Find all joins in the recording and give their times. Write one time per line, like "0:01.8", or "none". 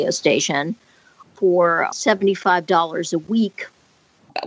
0:01.9